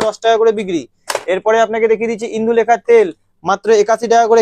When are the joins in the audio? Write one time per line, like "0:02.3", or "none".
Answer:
none

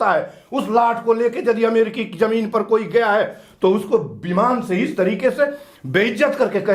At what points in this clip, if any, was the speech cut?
none

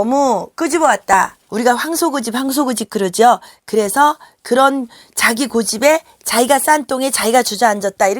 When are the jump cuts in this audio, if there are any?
0:01.1

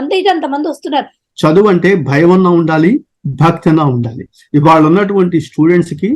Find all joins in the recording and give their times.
0:01.2

